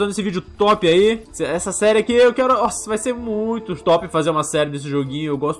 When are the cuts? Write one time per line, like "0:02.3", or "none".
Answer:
0:01.3
0:03.7